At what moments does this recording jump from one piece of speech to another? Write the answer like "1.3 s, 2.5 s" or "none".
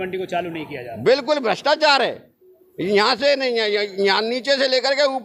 none